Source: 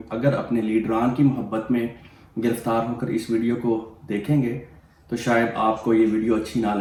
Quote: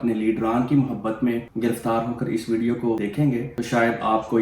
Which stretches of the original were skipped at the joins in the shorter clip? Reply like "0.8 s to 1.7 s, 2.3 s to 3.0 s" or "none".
2.0 s to 2.3 s, 3.9 s to 4.7 s